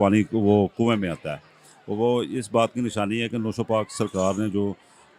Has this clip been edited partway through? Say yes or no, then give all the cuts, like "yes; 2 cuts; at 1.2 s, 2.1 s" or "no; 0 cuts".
no; 0 cuts